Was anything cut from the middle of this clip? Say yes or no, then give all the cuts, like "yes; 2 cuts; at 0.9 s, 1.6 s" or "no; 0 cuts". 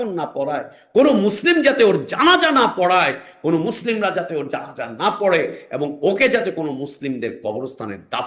no; 0 cuts